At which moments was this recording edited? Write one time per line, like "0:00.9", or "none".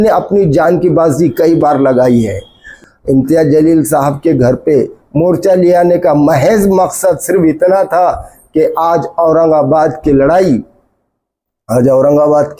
0:02.7